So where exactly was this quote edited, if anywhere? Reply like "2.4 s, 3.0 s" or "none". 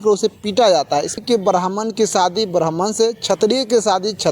1.2 s